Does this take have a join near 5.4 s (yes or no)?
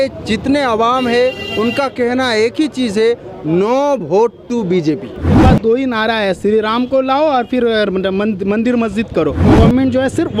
yes